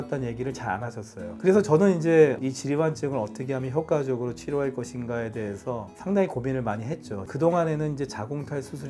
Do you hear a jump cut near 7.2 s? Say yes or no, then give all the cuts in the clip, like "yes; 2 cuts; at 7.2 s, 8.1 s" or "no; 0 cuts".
yes; 1 cut; at 7.2 s